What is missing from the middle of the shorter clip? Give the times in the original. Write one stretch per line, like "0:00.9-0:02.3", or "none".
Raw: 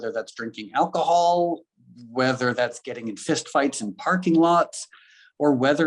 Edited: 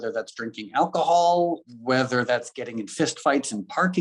0:01.7-0:02.0